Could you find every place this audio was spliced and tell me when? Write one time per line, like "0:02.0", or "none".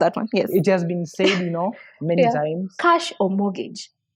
0:02.7